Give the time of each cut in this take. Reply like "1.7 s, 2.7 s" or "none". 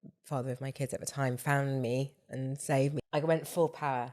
3.0 s